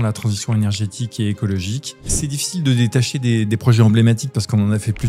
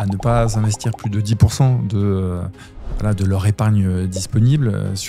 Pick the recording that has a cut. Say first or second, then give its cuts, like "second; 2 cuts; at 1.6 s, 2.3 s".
first; 1 cut; at 2.1 s